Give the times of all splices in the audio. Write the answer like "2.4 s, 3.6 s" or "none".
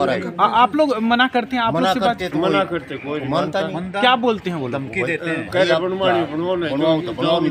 none